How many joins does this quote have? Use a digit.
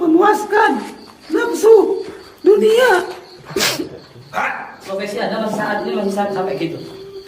1